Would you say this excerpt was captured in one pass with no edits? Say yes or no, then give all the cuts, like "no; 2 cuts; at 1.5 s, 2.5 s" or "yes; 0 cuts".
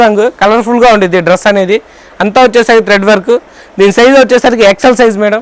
yes; 0 cuts